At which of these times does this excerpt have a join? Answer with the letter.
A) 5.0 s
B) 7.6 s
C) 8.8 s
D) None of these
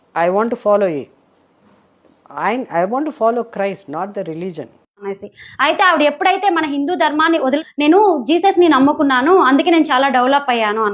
D